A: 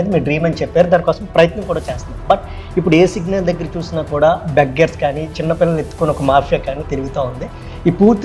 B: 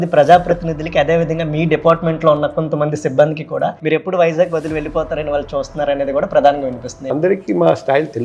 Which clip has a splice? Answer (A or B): B